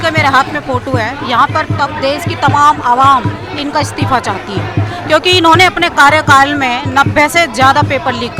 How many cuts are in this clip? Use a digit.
0